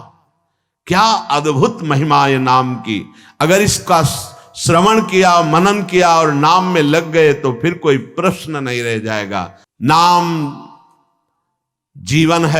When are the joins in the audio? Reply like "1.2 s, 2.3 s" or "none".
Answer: 9.6 s